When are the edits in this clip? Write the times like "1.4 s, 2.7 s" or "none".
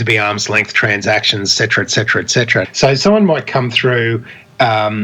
2.7 s